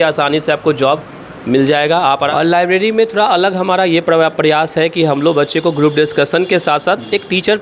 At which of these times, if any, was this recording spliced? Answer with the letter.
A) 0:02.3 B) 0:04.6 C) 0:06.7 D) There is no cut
A